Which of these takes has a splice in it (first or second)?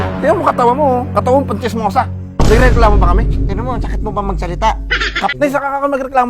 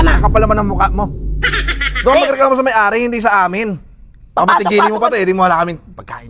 first